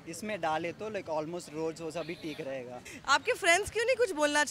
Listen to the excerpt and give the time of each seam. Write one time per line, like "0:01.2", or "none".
0:02.9